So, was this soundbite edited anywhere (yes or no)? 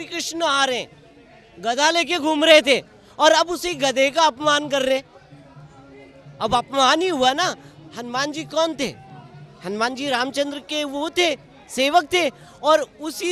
no